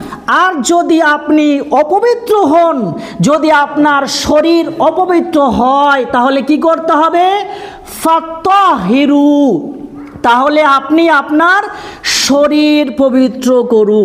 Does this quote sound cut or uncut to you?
uncut